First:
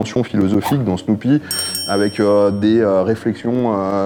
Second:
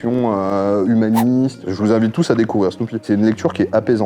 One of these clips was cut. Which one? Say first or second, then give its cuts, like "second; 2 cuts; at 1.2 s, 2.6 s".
second; 2 cuts; at 1.6 s, 3.0 s